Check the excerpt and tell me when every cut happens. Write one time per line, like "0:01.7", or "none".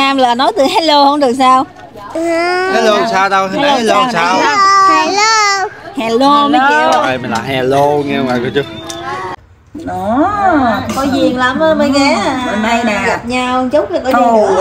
0:09.4